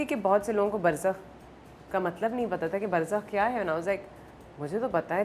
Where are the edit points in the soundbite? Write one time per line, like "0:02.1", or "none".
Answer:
none